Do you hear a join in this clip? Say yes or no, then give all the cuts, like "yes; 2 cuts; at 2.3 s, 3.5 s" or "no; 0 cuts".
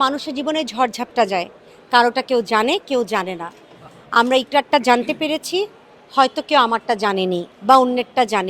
no; 0 cuts